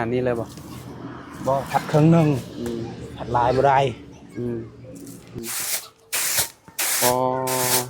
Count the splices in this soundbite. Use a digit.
1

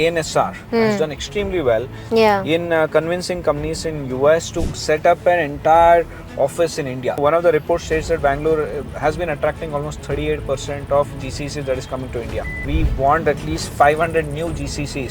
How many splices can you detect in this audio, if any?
2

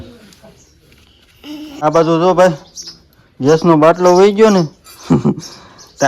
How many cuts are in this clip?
1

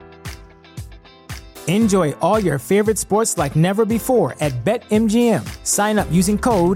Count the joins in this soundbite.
0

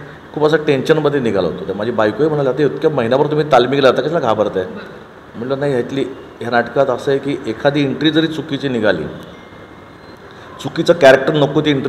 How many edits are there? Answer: 0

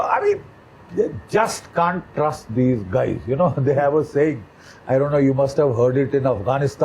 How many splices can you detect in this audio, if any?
0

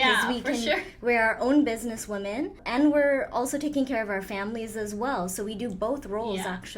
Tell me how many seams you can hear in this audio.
1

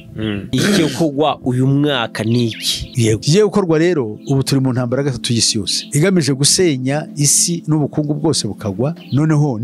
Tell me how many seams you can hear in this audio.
0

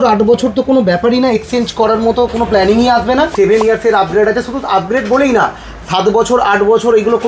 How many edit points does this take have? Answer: 1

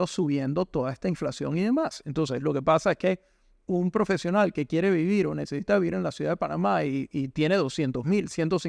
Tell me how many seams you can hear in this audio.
0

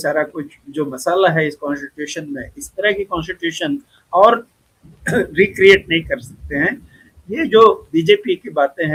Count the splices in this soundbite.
0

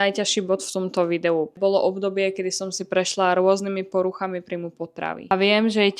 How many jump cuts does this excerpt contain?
2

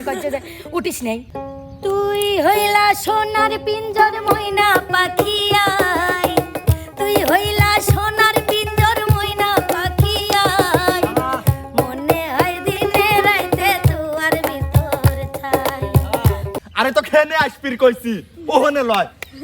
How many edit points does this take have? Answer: 2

